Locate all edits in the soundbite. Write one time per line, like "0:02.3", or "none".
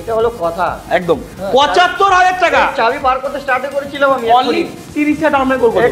none